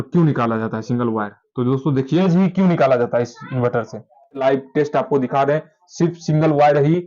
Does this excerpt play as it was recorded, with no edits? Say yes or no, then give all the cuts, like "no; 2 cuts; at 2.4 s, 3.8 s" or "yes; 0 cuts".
no; 2 cuts; at 2.2 s, 4.4 s